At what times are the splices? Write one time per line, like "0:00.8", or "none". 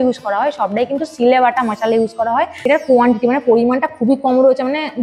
0:02.6